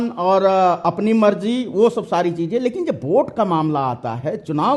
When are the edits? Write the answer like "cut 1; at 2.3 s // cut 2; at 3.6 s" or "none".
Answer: none